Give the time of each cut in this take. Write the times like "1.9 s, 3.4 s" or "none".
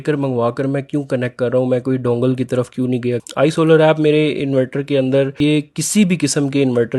3.3 s, 5.4 s